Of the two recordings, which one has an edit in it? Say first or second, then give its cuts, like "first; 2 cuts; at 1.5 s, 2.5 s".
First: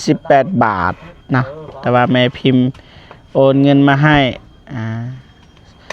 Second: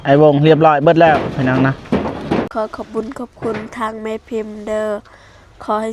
second; 1 cut; at 2.5 s